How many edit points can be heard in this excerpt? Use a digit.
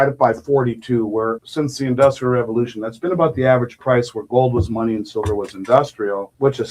1